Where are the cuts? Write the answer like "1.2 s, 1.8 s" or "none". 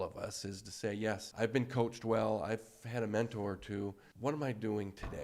1.3 s, 4.1 s